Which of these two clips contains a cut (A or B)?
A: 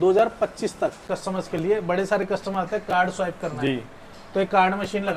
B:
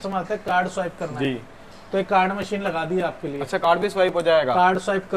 A